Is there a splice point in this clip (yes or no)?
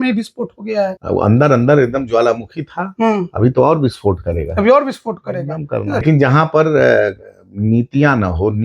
yes